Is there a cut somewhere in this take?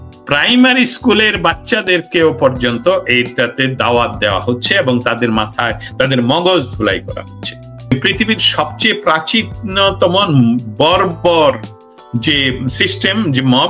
yes; 1 cut; at 7.9 s

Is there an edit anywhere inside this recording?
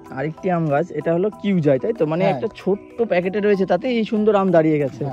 no; 0 cuts

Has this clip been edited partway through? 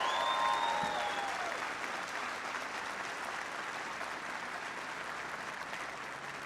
yes; 1 cut; at 1.4 s

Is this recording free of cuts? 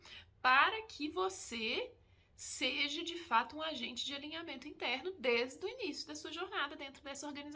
yes; 0 cuts

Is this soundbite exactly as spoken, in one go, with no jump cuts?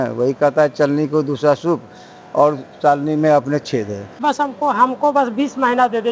no; 1 cut; at 4.2 s

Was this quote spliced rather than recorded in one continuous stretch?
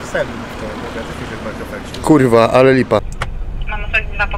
yes; 1 cut; at 3.0 s

